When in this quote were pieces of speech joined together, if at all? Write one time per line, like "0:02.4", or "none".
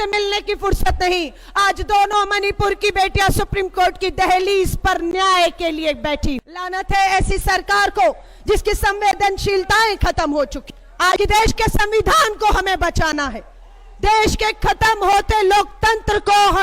0:06.6
0:11.2